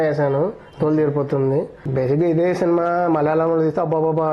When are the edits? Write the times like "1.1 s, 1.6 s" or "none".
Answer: 1.8 s